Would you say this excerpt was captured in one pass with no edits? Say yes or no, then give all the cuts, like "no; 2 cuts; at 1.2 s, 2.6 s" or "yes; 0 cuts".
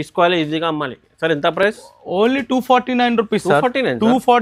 yes; 0 cuts